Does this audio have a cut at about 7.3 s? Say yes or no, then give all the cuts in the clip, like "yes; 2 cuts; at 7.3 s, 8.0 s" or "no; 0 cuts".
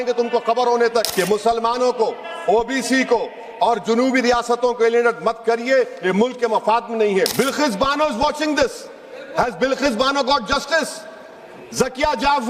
yes; 2 cuts; at 1.1 s, 7.3 s